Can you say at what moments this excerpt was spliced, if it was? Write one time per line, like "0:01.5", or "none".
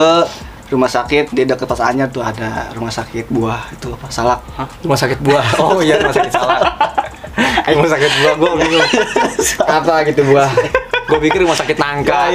none